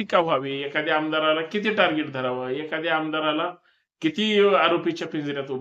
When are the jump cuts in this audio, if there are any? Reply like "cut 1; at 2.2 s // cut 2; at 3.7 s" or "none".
none